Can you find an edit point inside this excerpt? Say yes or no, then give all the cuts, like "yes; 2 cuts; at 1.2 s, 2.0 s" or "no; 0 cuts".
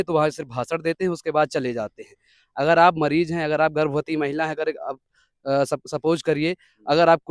no; 0 cuts